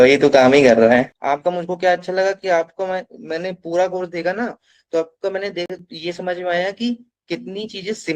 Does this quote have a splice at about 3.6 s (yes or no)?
no